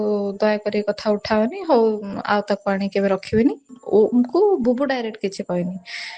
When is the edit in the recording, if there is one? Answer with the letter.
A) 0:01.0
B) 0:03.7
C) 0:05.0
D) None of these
B